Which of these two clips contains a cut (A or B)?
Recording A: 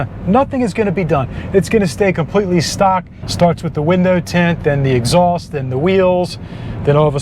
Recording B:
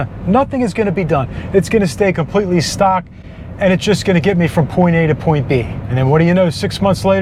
A